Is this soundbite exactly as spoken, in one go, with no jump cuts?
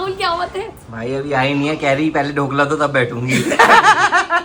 yes; 0 cuts

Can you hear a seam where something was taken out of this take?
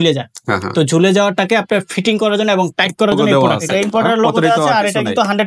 yes; 1 cut; at 3.6 s

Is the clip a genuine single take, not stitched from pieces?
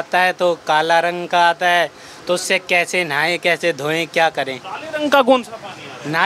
yes; 0 cuts

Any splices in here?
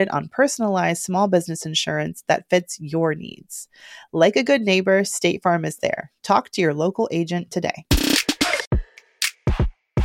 yes; 1 cut; at 8.8 s

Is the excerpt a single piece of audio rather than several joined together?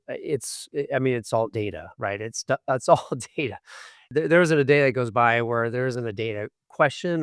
no; 1 cut; at 4.1 s

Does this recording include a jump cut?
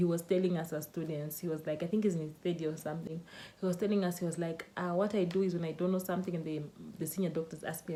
no; 0 cuts

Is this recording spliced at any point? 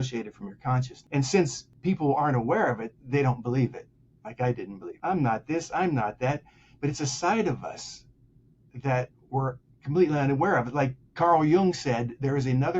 yes; 3 cuts; at 1.0 s, 1.7 s, 4.8 s

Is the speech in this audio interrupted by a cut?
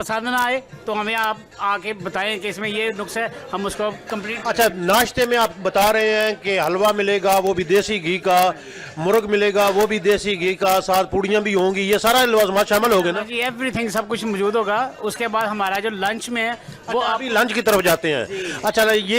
no; 0 cuts

